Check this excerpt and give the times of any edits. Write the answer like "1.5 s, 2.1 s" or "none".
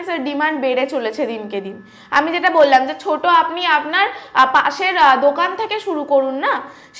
none